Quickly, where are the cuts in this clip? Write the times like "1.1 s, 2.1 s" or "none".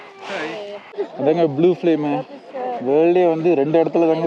1.1 s